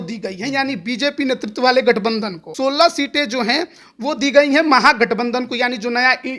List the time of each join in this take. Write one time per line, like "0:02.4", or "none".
0:02.5